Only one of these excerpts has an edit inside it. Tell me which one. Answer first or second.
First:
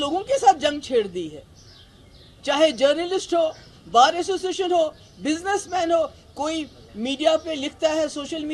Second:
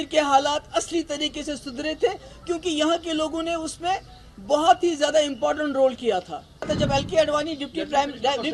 second